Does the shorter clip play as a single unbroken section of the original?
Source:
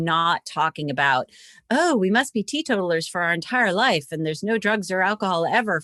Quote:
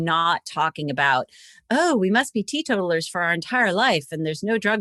yes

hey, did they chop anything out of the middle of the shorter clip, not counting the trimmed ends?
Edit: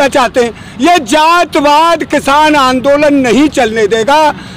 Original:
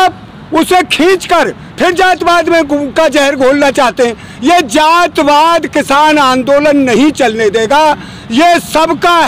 no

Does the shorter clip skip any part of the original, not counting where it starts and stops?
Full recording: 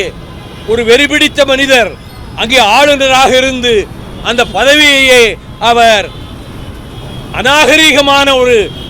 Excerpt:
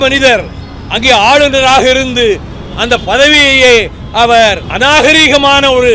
yes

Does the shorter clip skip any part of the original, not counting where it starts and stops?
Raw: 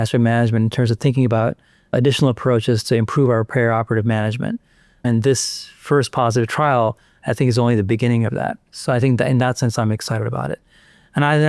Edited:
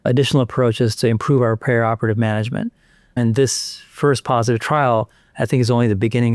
no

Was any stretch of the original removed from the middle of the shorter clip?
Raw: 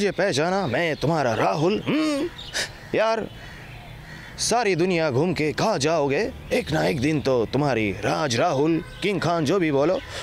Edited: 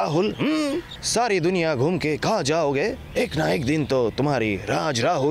yes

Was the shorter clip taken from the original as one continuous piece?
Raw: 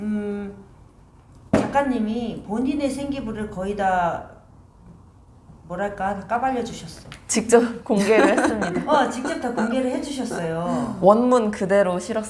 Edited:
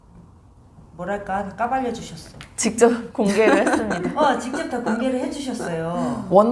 yes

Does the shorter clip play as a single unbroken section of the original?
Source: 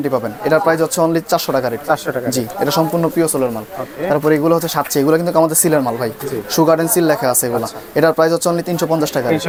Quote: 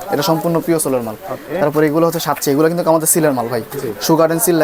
yes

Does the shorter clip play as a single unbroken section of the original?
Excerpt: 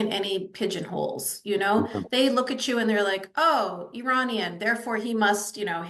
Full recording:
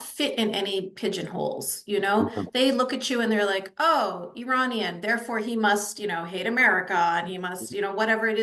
yes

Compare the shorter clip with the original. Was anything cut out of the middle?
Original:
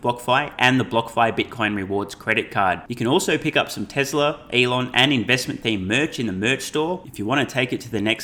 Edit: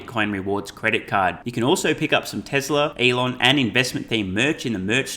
yes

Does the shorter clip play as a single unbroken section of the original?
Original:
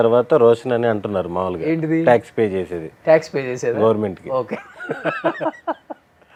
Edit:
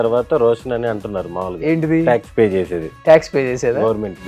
yes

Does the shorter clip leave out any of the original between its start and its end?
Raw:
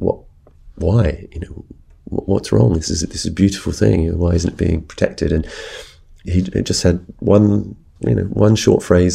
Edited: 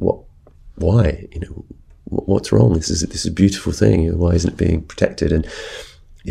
no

